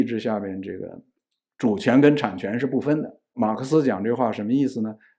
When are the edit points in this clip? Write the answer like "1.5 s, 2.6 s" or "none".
3.4 s